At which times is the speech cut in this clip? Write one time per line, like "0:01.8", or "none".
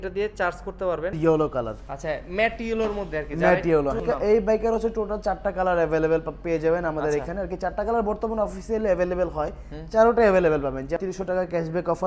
0:01.2
0:04.0
0:11.0